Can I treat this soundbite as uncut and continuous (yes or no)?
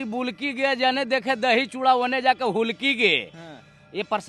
yes